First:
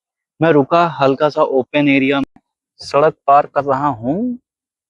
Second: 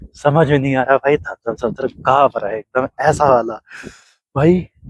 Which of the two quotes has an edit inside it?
first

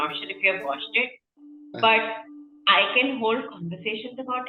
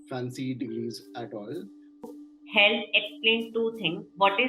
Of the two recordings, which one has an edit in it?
second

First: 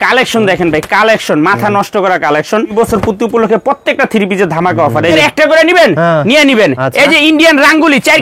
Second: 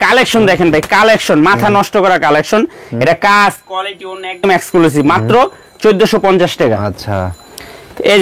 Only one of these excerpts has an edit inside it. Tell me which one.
first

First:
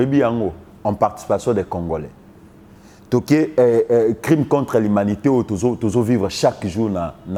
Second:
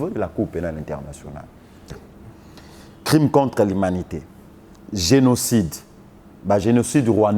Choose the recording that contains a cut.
second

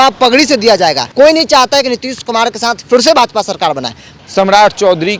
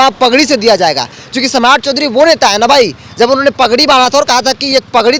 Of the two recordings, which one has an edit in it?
first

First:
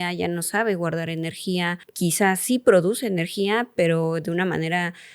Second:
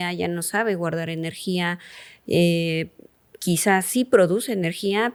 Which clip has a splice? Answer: first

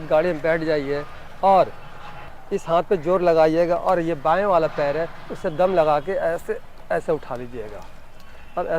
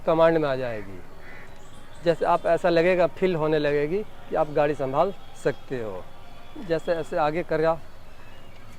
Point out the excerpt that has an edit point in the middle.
first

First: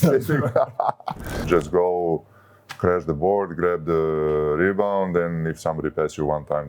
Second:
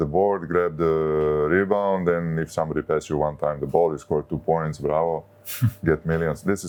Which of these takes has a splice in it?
first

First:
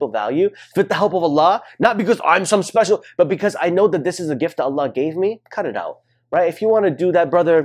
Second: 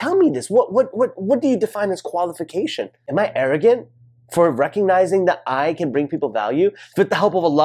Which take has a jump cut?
second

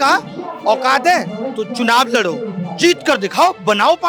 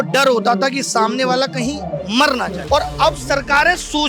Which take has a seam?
second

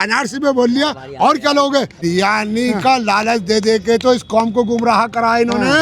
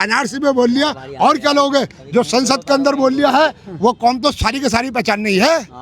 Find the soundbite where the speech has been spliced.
first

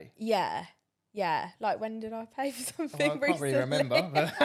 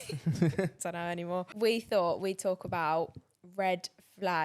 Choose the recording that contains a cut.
second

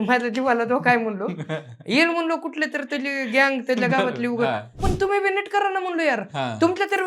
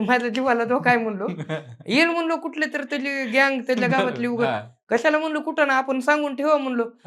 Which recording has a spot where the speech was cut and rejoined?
first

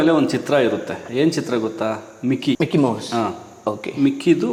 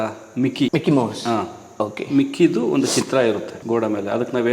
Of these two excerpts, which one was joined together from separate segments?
second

